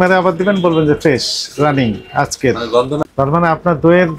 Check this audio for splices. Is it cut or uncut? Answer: cut